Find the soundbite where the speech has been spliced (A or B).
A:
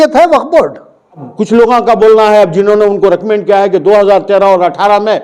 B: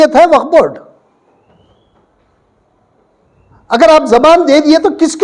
A